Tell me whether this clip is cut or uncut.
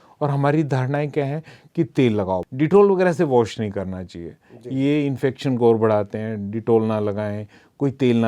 cut